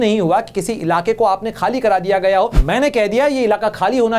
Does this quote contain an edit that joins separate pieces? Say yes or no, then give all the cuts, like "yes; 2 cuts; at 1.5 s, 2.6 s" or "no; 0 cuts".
yes; 1 cut; at 2.6 s